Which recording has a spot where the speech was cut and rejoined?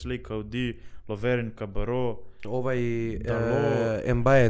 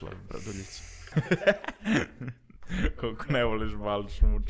second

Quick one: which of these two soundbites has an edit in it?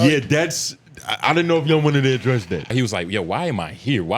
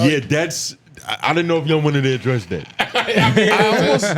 first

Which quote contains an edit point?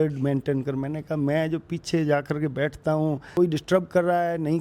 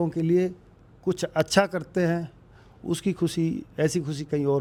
first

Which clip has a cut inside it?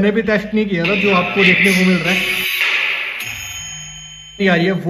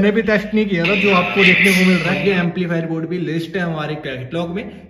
second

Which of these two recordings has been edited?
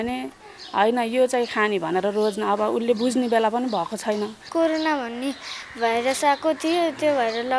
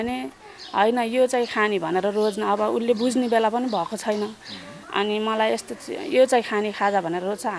first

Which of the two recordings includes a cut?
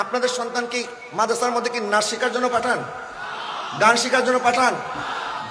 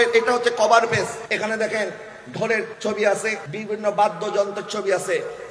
second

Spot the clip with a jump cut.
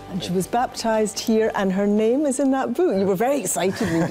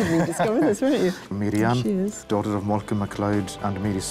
second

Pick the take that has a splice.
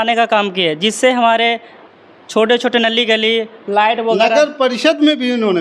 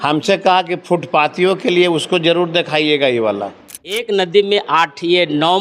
second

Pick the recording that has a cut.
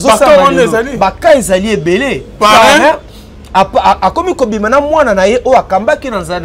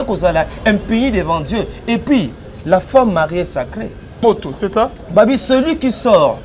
second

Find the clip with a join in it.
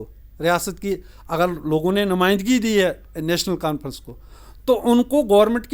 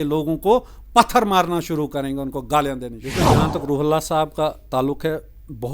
second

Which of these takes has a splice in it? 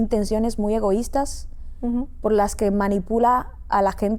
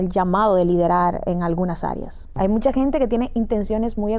second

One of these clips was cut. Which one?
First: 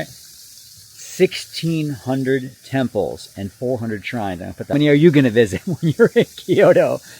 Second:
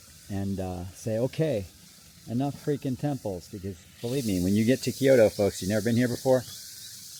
first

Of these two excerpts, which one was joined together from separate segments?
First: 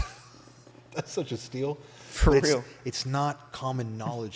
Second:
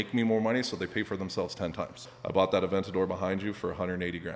second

